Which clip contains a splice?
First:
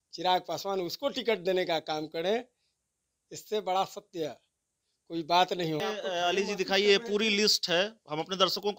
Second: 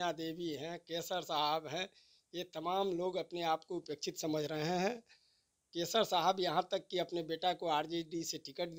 first; 1 cut; at 5.8 s

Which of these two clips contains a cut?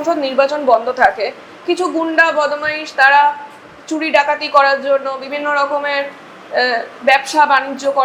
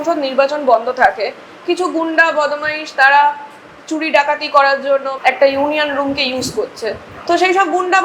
second; 1 cut; at 5.1 s

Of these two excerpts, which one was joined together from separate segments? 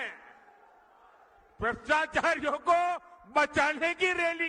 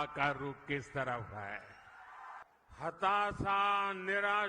second; 1 cut; at 2.4 s

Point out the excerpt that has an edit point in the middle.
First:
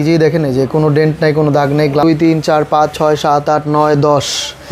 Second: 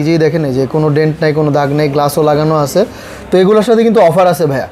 first; 1 cut; at 2.0 s

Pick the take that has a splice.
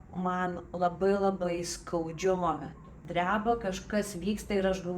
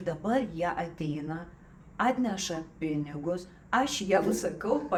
first; 1 cut; at 3.0 s

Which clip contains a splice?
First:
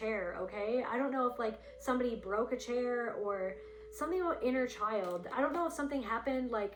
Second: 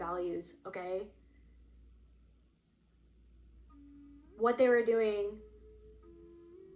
second; 1 cut; at 5.8 s

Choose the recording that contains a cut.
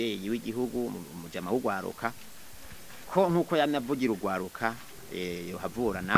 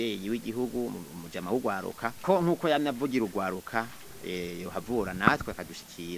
second; 1 cut; at 2.2 s

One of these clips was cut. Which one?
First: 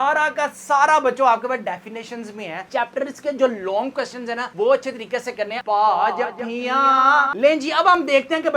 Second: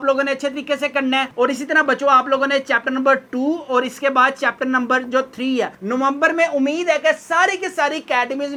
first; 3 cuts; at 2.7 s, 5.5 s, 7.3 s

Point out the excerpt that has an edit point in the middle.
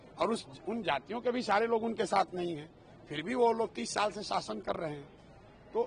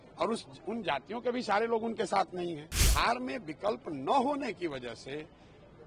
second; 1 cut; at 2.8 s

